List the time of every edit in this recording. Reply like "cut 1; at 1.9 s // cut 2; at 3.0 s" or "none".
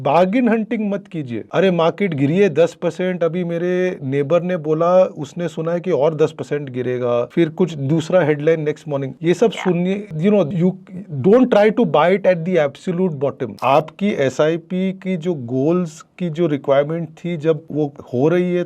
cut 1; at 13.5 s